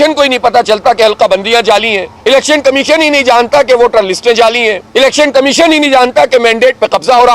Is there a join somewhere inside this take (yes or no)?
yes